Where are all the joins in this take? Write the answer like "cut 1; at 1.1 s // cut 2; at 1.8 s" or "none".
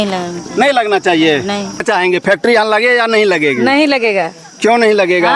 cut 1; at 1.8 s